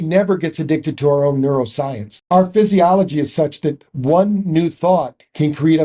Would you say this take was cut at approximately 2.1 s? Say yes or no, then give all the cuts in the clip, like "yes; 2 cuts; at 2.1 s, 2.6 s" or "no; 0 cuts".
yes; 1 cut; at 2.1 s